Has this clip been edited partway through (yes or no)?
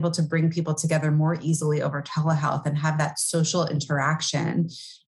no